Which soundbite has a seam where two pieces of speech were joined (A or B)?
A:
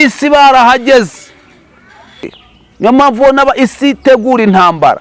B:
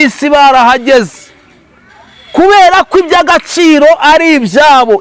A